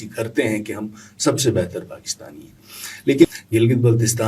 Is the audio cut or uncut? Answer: cut